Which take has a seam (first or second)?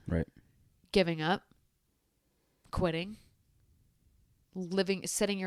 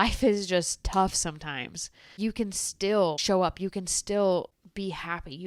second